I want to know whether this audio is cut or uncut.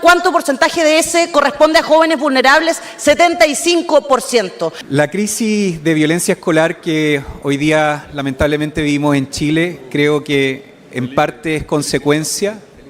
cut